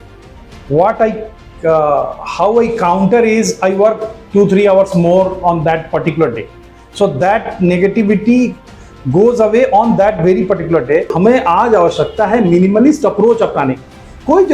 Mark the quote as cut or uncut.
cut